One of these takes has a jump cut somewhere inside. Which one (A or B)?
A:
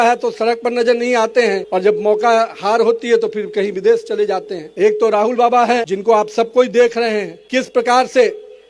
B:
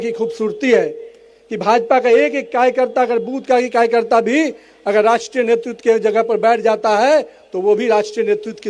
A